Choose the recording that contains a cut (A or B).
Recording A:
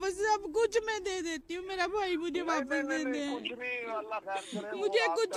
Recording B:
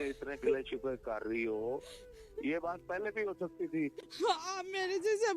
B